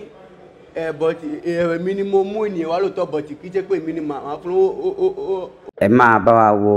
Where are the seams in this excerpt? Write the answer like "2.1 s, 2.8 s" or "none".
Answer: 5.5 s